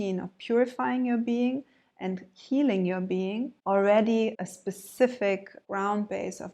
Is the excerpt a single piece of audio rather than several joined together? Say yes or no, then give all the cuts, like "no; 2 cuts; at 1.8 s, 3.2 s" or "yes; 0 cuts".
no; 3 cuts; at 3.6 s, 4.4 s, 5.6 s